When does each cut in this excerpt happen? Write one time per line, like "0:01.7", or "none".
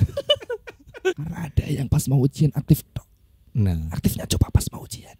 0:01.1